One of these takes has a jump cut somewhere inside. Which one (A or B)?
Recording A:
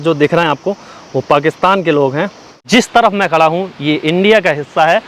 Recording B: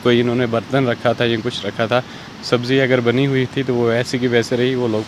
A